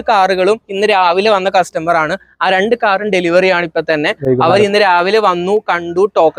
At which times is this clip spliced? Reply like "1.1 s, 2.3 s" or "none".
none